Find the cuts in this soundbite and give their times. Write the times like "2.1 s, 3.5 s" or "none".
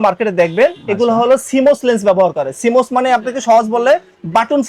none

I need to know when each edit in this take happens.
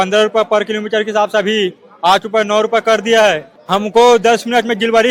3.5 s

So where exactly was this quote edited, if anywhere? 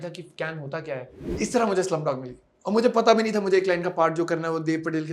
1.2 s

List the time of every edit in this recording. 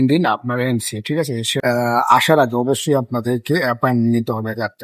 1.5 s

